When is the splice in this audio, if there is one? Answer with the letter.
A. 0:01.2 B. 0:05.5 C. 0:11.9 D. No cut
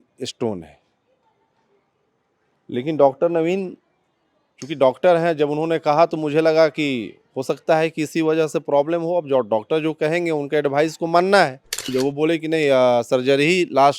C